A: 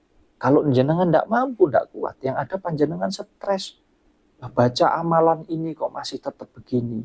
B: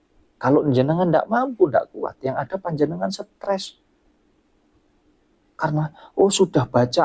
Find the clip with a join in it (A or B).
A